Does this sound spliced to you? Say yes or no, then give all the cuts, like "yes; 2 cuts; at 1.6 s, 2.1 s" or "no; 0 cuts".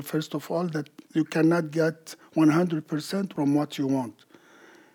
no; 0 cuts